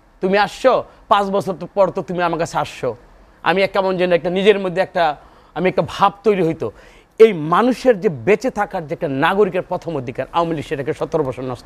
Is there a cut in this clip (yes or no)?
no